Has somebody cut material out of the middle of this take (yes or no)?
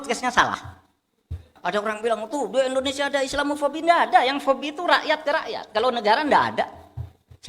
yes